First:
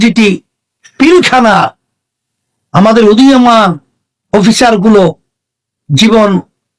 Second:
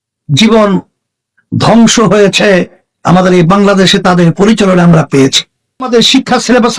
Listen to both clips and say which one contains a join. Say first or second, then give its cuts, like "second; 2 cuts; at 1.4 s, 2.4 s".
second; 1 cut; at 5.9 s